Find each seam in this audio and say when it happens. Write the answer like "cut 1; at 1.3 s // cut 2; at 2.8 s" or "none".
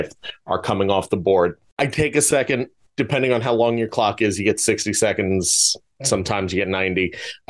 cut 1; at 1.6 s // cut 2; at 2.8 s